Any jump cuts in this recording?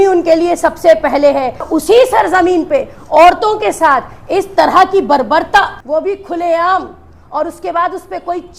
yes; 2 cuts; at 1.7 s, 5.8 s

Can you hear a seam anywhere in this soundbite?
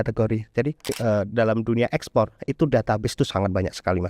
yes; 1 cut; at 0.9 s

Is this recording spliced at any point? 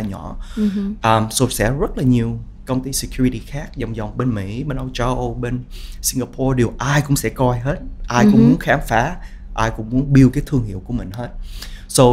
no; 0 cuts

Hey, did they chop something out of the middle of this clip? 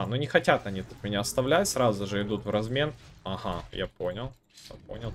no; 0 cuts

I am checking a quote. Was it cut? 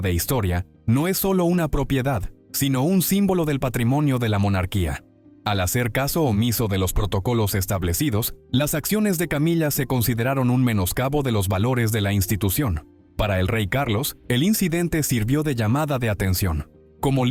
no; 0 cuts

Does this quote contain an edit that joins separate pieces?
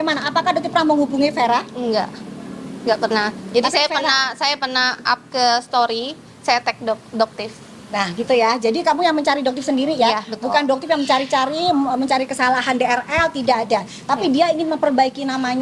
no; 0 cuts

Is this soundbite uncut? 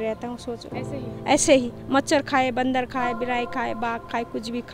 yes; 0 cuts

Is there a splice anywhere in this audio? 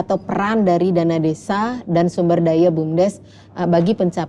no; 0 cuts

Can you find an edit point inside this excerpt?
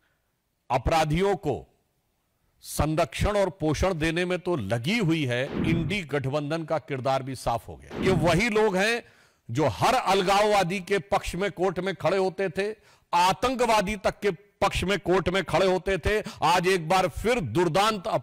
yes; 2 cuts; at 5.6 s, 8.0 s

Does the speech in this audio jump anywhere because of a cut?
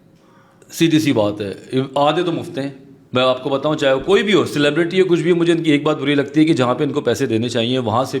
no; 0 cuts

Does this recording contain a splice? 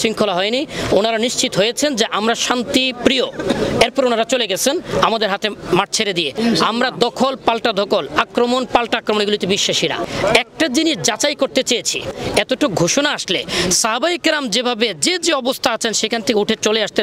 yes; 3 cuts; at 6.3 s, 10.0 s, 12.1 s

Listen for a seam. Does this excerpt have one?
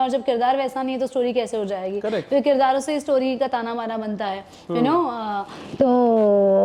no; 0 cuts

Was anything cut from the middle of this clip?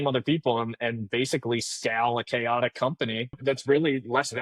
yes; 1 cut; at 3.4 s

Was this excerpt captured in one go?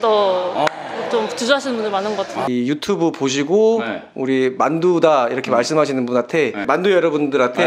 no; 2 cuts; at 2.5 s, 6.7 s

